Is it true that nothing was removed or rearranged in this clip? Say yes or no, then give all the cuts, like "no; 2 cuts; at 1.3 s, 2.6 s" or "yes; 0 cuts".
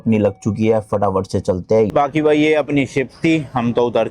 no; 1 cut; at 1.9 s